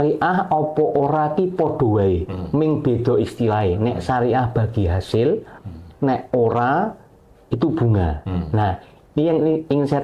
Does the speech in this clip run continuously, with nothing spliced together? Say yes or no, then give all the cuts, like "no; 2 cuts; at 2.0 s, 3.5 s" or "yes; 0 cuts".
yes; 0 cuts